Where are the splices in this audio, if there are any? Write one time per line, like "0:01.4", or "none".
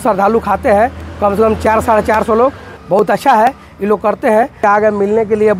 0:02.7
0:04.6